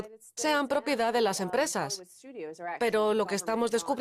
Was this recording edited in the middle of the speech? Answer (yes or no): yes